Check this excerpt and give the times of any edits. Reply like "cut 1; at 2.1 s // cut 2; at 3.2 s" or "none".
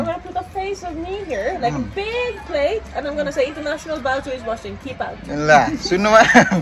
none